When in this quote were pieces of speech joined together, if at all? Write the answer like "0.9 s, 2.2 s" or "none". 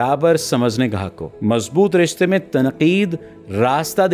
1.3 s